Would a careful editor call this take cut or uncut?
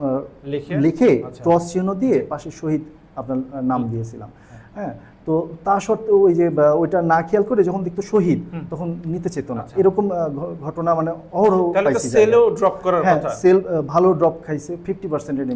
uncut